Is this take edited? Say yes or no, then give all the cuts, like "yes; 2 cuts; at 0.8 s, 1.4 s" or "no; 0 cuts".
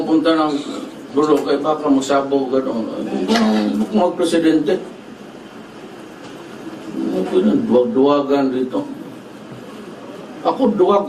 yes; 1 cut; at 8.9 s